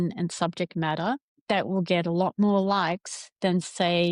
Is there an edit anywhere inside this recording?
yes; 1 cut; at 1.3 s

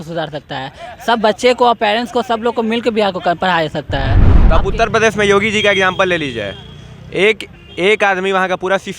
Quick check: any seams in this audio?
yes; 1 cut; at 4.3 s

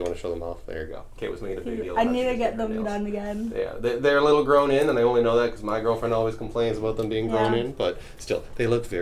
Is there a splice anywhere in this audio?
no; 0 cuts

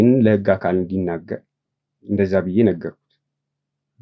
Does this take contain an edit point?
no; 0 cuts

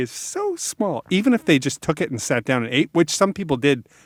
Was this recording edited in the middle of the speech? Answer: no; 0 cuts

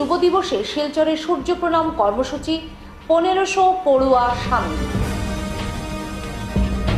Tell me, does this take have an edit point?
no; 0 cuts

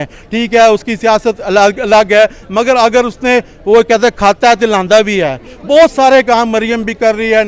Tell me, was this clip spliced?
no; 0 cuts

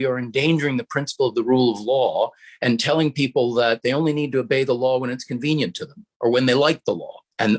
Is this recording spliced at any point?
no; 0 cuts

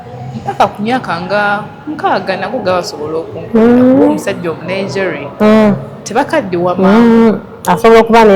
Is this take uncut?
yes; 0 cuts

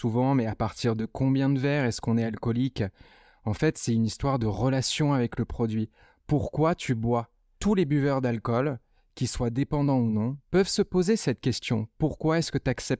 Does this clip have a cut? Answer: yes; 1 cut; at 7.4 s

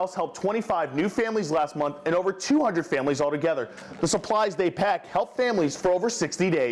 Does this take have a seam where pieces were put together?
no; 0 cuts

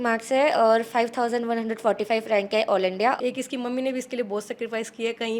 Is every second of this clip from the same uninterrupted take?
no; 1 cut; at 3.2 s

